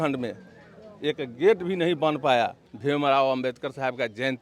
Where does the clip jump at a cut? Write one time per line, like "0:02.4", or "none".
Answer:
0:02.6